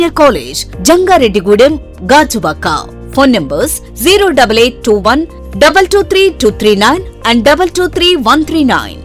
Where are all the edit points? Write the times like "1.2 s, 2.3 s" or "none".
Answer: none